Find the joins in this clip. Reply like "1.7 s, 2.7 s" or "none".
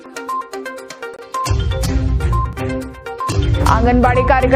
1.0 s